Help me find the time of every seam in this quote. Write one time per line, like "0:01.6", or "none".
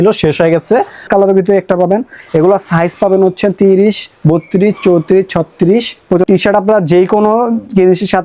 0:01.1
0:06.2